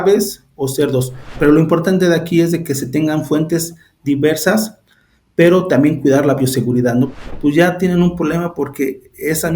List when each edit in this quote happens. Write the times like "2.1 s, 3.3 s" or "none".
1.3 s, 7.2 s